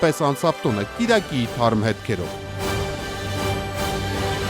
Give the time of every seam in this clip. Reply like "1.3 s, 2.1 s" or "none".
2.3 s